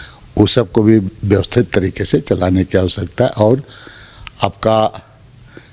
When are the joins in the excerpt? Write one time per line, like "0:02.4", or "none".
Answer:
none